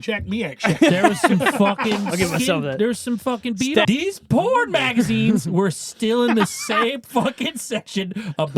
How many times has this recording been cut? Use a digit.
1